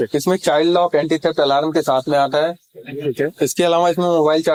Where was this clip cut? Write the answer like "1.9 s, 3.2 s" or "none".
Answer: none